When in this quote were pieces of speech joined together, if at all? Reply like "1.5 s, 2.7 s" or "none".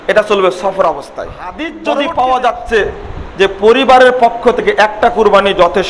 1.7 s